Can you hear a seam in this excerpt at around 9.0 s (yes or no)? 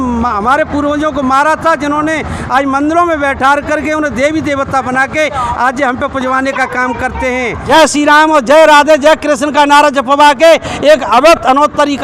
no